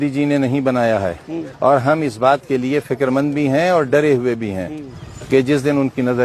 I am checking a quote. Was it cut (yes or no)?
no